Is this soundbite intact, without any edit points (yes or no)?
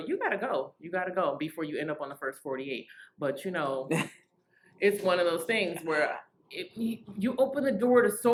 yes